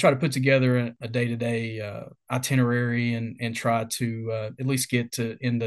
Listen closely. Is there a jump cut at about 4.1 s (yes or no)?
no